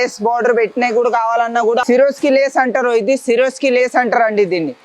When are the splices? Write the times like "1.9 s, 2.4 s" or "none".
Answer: none